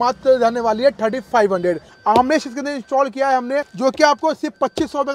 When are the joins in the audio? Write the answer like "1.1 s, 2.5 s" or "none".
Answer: 1.9 s, 3.7 s